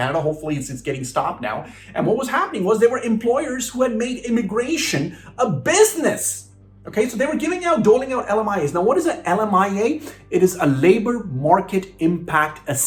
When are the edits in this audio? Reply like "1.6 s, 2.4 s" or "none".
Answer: none